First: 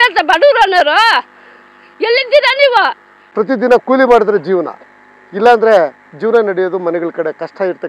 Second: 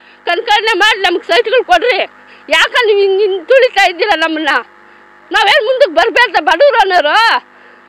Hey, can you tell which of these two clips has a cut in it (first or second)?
first